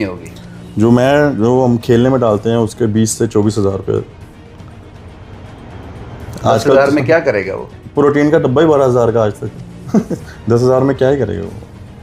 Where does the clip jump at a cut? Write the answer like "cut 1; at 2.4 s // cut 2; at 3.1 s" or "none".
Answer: none